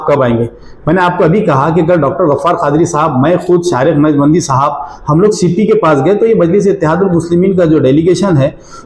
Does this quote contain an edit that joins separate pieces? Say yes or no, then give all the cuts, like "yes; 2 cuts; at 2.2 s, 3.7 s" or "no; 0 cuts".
no; 0 cuts